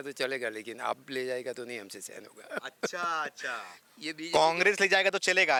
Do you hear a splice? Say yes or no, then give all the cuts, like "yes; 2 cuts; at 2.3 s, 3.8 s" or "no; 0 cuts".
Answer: no; 0 cuts